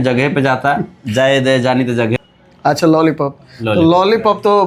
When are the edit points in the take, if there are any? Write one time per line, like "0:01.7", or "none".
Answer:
0:02.2